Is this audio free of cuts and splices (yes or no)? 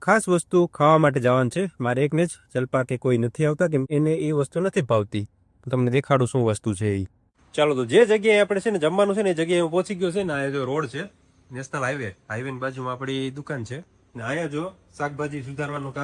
yes